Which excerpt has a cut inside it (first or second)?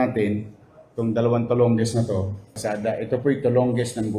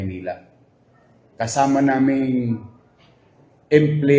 first